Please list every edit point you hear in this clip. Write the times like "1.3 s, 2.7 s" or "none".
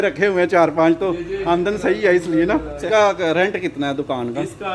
2.9 s